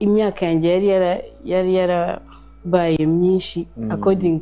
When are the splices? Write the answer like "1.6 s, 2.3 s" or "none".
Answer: none